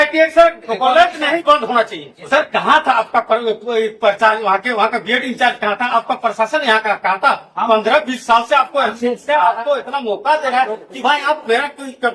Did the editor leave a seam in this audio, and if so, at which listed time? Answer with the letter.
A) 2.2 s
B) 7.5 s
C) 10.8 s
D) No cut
A